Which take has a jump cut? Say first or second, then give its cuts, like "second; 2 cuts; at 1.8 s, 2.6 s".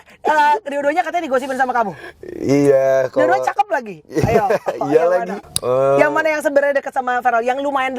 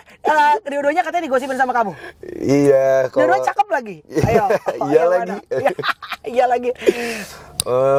first; 1 cut; at 5.4 s